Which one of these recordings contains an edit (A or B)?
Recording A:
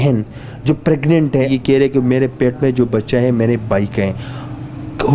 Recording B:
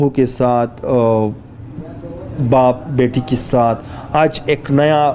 A